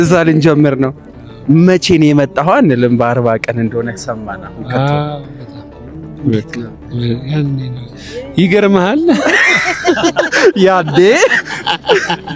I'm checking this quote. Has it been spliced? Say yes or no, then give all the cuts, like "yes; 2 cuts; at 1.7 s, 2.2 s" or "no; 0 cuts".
no; 0 cuts